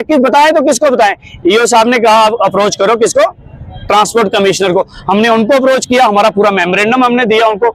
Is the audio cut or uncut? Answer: uncut